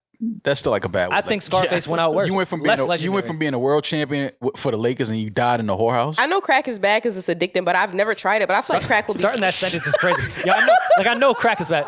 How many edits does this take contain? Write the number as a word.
one